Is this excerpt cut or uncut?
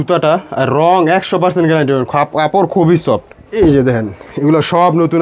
cut